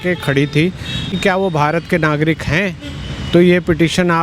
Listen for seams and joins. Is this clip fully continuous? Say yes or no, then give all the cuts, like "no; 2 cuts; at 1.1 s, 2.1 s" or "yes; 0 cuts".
no; 1 cut; at 1.1 s